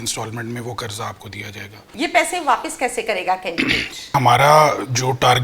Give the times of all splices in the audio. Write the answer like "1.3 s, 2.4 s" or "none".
1.8 s, 4.1 s

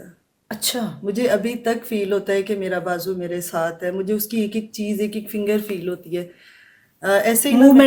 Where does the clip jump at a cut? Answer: none

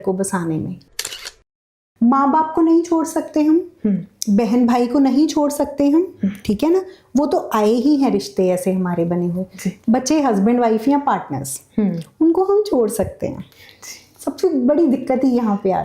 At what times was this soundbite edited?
1.3 s, 9.7 s

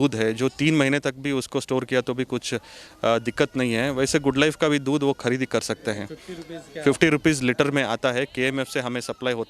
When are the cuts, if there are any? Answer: none

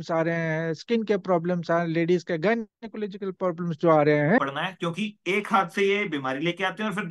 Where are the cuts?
4.4 s

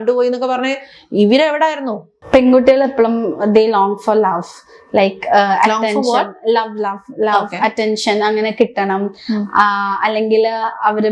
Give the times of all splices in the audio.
2.1 s

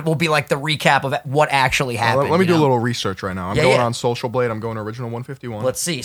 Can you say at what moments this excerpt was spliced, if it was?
none

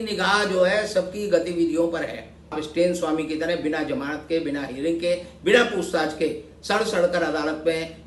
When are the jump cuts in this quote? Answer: 2.6 s

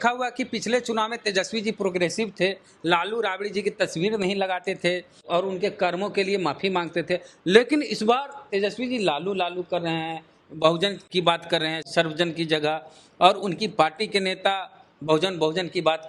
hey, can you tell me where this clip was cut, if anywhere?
none

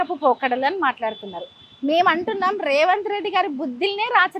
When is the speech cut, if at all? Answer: none

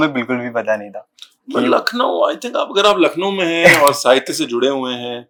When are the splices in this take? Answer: none

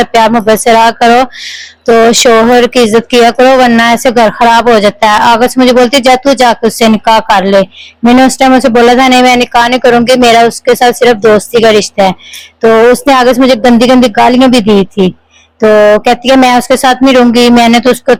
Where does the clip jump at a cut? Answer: none

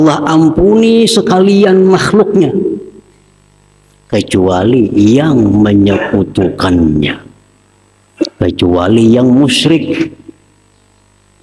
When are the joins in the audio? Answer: none

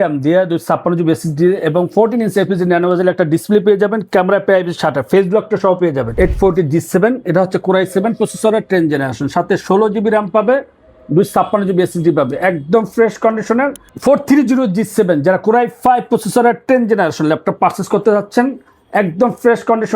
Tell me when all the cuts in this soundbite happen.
6.1 s, 13.9 s

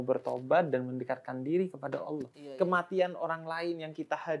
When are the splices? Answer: 2.4 s

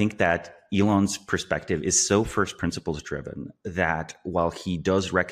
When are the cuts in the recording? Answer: none

